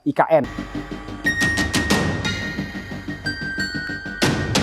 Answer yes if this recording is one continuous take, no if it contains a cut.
yes